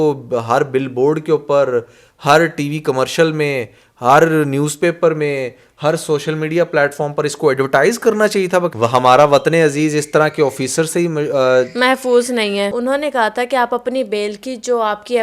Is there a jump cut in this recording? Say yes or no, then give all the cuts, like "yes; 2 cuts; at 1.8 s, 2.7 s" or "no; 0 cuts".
yes; 2 cuts; at 8.7 s, 12.7 s